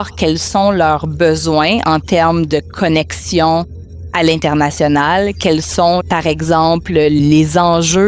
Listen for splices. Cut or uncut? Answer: cut